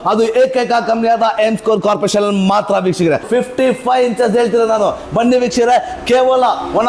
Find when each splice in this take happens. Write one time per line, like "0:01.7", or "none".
0:03.3